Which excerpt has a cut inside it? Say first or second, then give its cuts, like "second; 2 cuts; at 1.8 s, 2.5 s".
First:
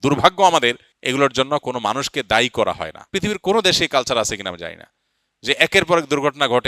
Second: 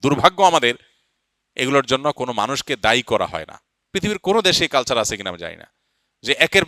first; 2 cuts; at 0.9 s, 2.9 s